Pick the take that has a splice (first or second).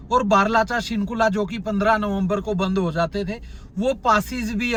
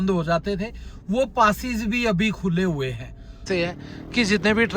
second